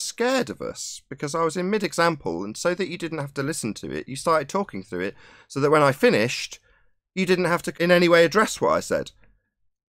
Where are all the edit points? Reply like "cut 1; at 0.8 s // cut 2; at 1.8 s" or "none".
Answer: cut 1; at 7.7 s